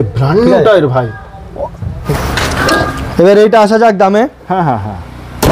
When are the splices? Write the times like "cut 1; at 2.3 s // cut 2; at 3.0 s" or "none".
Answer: cut 1; at 2.1 s